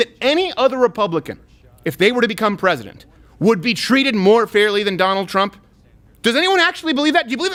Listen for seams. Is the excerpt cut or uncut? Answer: uncut